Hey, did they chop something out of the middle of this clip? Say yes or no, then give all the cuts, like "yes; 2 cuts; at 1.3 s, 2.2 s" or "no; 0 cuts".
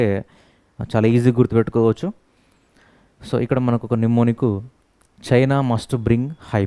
no; 0 cuts